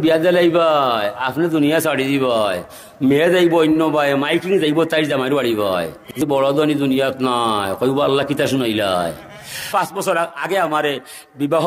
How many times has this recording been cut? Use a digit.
2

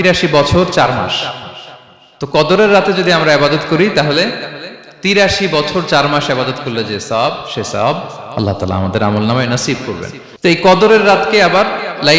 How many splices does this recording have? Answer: 1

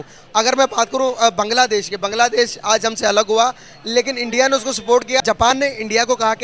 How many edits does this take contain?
1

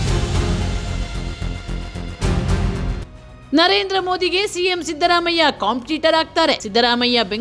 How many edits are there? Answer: 1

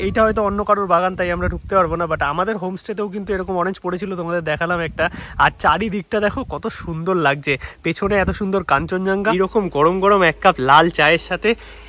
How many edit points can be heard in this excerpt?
1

